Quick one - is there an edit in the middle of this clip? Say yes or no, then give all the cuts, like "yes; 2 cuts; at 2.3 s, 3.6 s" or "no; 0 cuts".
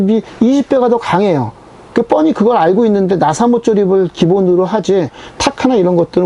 no; 0 cuts